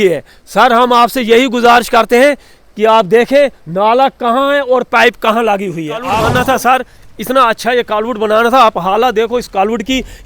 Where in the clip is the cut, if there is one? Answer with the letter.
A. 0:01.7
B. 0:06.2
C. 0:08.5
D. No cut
B